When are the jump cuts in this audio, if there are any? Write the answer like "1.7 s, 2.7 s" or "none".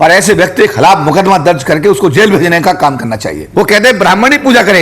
3.4 s